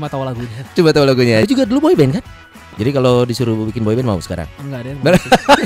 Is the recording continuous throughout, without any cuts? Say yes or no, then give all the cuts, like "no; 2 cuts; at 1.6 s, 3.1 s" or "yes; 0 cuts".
no; 2 cuts; at 1.4 s, 2.6 s